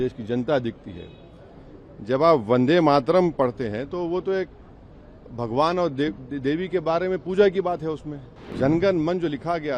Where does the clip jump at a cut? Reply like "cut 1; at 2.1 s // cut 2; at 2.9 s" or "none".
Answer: cut 1; at 8.4 s